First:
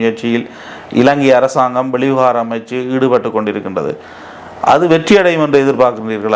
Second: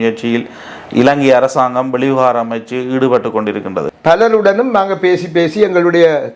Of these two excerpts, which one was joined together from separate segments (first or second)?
second